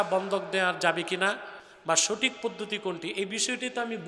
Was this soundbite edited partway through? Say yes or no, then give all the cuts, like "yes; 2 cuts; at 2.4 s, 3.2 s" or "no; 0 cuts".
no; 0 cuts